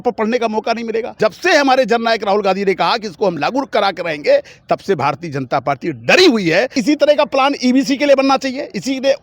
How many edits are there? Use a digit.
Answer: 2